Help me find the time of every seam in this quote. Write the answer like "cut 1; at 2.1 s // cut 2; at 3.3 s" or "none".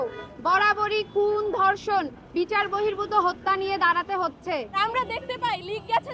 cut 1; at 4.8 s